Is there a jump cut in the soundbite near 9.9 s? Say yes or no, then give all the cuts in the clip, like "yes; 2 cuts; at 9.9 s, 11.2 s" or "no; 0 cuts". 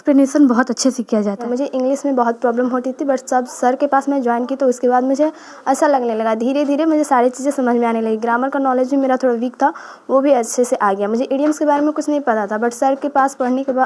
no; 1 cut; at 1.4 s